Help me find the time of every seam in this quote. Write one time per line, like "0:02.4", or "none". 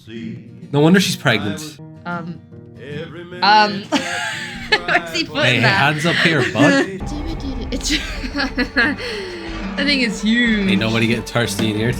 0:01.9
0:07.0